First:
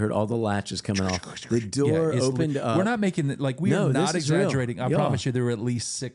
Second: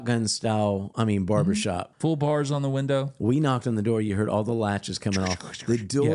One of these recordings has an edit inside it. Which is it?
second; 3 cuts; at 0.9 s, 1.9 s, 3.1 s

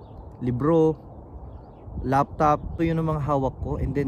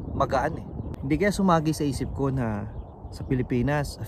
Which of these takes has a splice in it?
second; 1 cut; at 0.9 s

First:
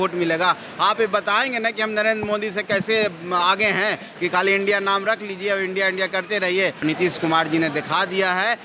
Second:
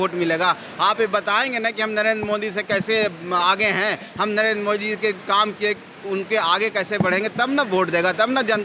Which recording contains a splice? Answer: first; 2 cuts; at 4.1 s, 6.8 s

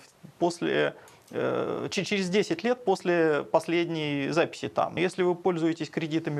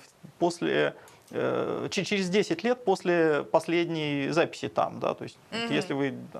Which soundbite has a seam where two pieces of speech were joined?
first; 1 cut; at 4.9 s

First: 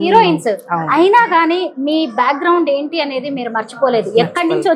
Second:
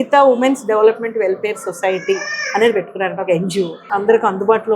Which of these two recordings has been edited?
second; 1 cut; at 3.8 s

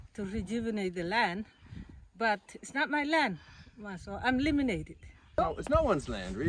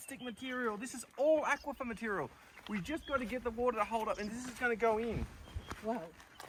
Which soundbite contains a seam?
first; 1 cut; at 5.4 s

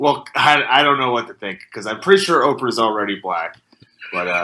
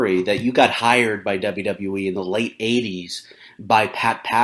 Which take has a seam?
second; 1 cut; at 1.0 s

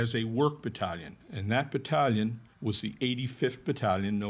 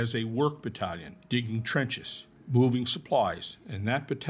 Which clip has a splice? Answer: first; 1 cut; at 1.1 s

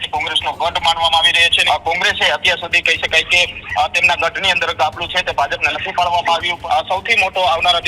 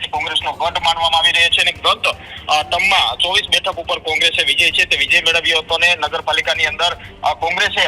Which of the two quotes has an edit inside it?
first; 2 cuts; at 1.5 s, 6.5 s

